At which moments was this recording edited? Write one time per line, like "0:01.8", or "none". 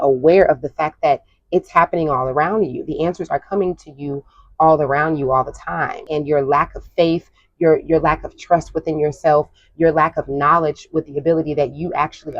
0:06.0